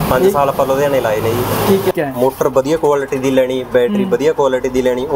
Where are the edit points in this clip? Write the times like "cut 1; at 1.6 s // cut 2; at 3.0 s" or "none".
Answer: cut 1; at 1.9 s